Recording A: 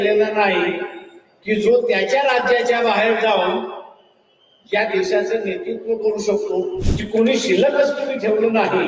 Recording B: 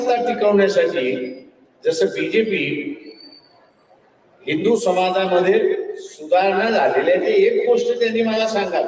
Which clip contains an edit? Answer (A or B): A